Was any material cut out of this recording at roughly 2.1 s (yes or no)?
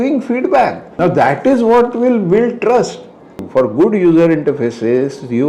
no